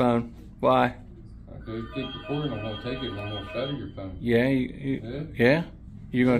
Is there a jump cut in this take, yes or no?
no